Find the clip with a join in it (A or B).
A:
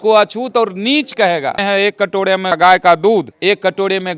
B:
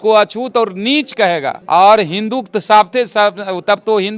A